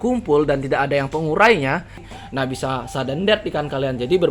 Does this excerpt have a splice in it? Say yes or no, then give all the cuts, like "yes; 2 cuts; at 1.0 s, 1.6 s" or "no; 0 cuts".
yes; 1 cut; at 2.1 s